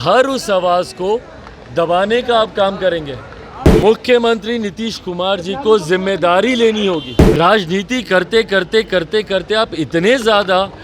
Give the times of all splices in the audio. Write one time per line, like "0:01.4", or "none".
0:03.7
0:07.2